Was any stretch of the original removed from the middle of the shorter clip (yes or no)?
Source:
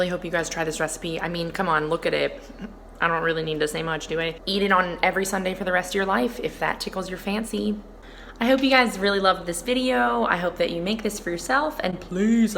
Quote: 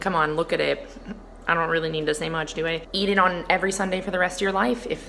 no